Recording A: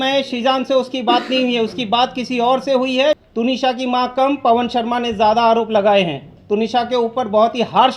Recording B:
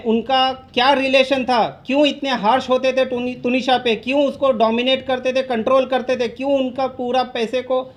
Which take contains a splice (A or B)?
A